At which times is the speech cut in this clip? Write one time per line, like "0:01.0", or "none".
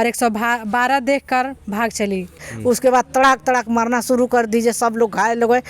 0:02.5